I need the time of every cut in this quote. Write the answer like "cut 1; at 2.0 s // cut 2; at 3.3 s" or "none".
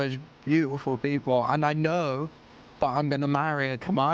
none